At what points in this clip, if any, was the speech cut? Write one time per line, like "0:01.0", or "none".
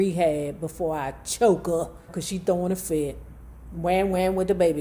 0:02.2